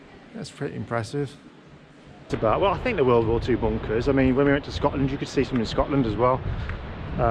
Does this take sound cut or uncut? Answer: cut